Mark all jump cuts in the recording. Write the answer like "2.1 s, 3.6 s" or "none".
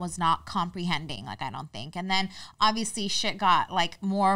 none